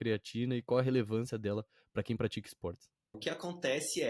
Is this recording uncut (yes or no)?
no